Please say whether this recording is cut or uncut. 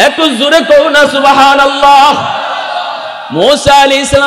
uncut